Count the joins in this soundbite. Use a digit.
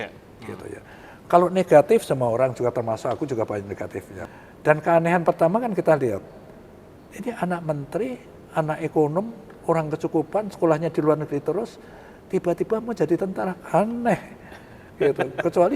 1